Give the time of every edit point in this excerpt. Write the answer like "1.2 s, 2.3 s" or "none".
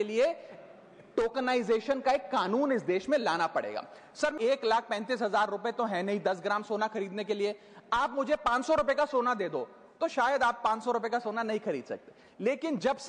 4.3 s